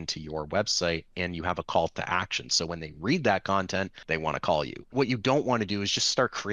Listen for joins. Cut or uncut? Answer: cut